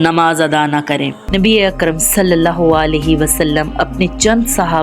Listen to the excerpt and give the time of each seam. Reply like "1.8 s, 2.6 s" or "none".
1.2 s